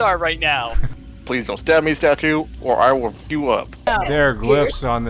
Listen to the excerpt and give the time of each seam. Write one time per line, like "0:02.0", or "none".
0:00.9
0:03.9